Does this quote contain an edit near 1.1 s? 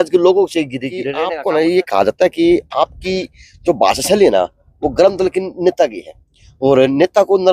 yes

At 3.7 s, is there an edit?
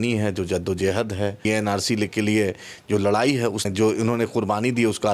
yes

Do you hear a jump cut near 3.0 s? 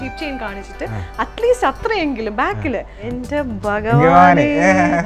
yes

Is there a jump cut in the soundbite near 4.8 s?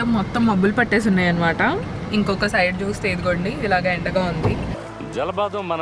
yes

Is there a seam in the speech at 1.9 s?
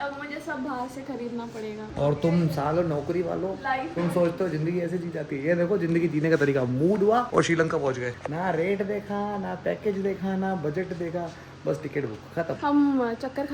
yes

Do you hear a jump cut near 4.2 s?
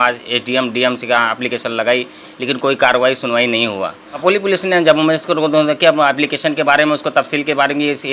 yes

